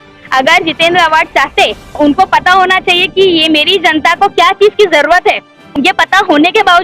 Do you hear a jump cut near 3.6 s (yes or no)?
no